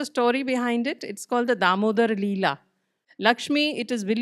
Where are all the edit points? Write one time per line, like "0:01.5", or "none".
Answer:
0:03.1